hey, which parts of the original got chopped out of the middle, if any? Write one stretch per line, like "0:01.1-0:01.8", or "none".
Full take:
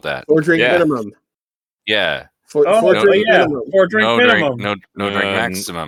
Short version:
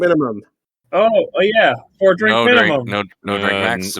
0:01.6-0:02.7